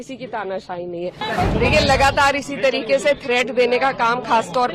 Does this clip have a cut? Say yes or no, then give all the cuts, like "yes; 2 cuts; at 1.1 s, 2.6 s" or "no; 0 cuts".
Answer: yes; 1 cut; at 1.2 s